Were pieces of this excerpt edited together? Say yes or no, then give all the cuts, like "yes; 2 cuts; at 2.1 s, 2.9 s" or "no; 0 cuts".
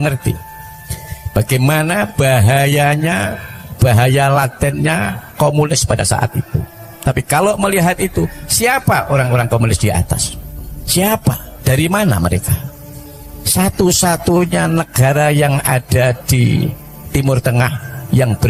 no; 0 cuts